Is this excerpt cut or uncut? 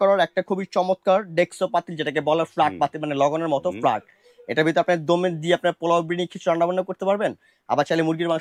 uncut